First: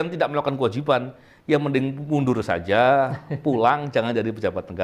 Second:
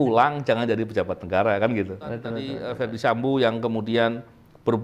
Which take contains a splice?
second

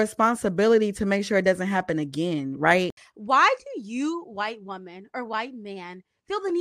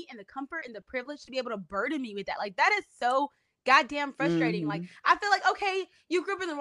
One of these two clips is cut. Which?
first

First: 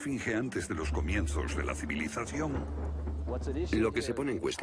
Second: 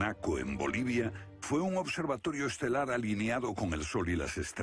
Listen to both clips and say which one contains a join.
second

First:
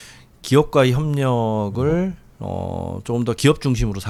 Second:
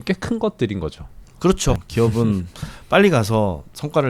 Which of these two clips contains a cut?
second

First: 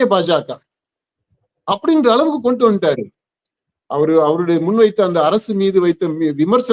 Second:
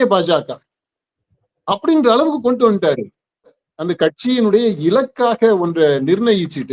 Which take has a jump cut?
second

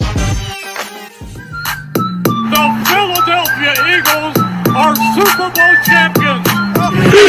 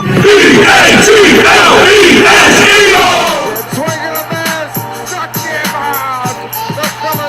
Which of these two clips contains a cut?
first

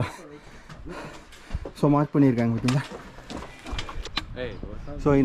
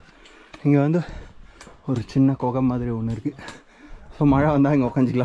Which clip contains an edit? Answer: first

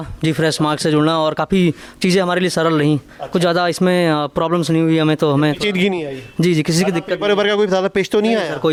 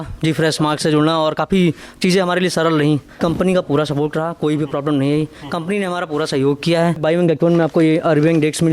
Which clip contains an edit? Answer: second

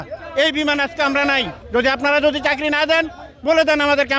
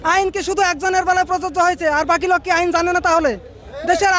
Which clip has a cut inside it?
first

